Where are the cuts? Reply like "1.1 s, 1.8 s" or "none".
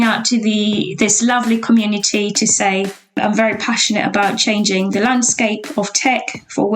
3.2 s